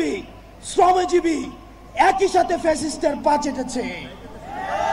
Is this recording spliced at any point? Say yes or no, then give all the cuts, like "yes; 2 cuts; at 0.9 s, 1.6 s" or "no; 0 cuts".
no; 0 cuts